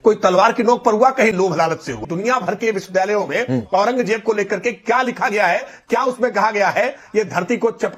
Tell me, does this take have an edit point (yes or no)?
yes